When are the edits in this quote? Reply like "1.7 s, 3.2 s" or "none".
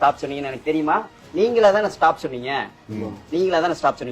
1.2 s